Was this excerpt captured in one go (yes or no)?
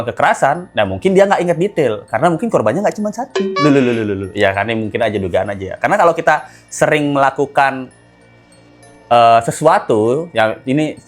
yes